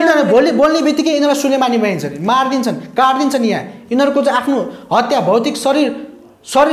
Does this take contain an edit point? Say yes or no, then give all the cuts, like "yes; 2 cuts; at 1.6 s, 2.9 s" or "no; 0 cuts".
no; 0 cuts